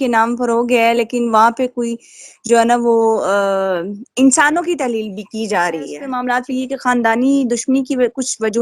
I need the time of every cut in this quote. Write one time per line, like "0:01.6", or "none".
0:06.0